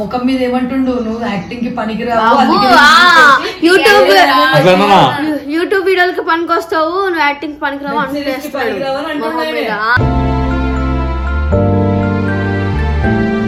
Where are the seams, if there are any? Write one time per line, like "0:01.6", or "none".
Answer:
none